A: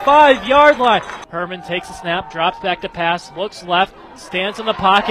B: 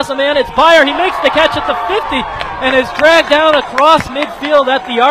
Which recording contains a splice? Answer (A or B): A